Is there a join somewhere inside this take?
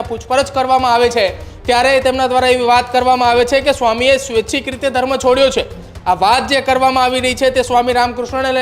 no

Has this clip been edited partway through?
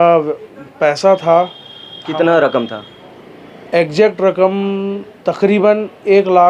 no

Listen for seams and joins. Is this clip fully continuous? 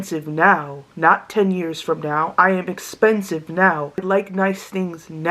no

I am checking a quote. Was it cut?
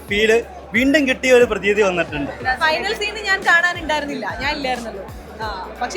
yes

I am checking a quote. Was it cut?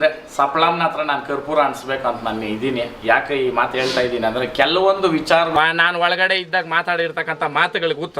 yes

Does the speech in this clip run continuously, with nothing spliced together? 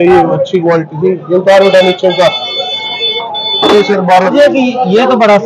no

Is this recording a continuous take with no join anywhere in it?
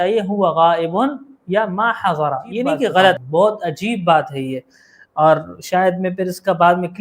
no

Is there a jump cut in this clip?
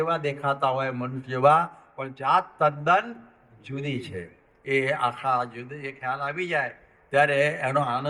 no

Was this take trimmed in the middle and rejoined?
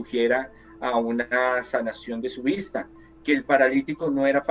no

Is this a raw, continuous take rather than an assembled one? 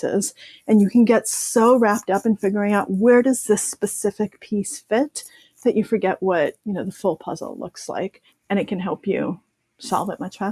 no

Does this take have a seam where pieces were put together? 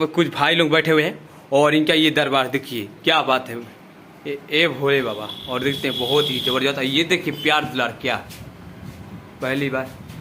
no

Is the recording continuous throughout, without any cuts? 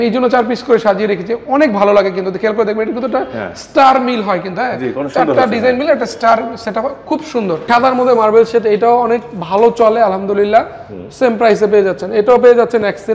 no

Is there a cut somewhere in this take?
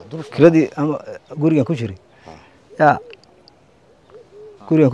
no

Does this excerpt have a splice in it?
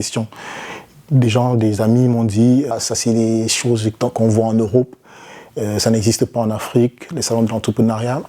yes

